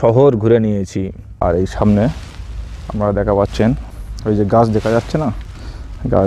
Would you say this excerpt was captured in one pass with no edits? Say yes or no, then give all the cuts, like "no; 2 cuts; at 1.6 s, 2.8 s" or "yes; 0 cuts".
no; 2 cuts; at 1.2 s, 3.9 s